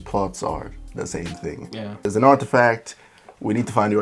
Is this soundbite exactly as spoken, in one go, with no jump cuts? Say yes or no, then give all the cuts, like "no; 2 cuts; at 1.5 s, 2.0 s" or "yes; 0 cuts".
no; 1 cut; at 2.0 s